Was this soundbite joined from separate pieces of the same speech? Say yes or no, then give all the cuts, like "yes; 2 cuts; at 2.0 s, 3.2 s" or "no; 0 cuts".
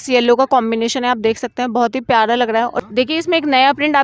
yes; 1 cut; at 2.8 s